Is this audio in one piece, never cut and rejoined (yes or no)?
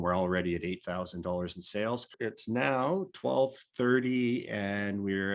no